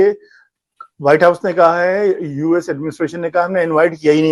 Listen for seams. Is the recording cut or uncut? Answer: uncut